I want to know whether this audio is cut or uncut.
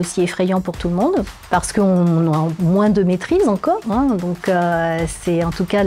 cut